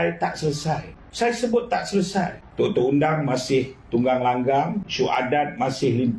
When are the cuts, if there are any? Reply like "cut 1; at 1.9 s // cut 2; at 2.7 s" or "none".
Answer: cut 1; at 1.0 s // cut 2; at 2.4 s // cut 3; at 4.8 s

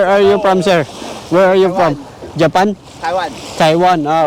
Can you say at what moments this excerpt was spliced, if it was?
none

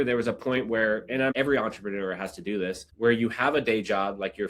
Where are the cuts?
cut 1; at 1.3 s // cut 2; at 2.9 s

